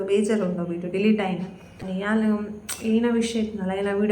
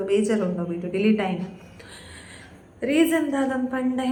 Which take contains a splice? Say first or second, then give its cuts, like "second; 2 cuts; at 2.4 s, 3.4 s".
first; 1 cut; at 1.8 s